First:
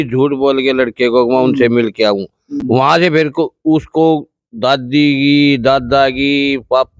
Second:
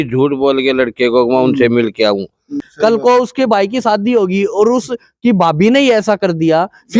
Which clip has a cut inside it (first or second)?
second